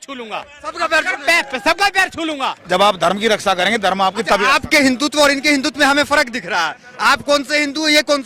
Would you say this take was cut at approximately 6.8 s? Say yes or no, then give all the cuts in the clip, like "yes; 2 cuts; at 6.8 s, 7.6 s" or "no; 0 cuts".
no; 1 cut; at 2.6 s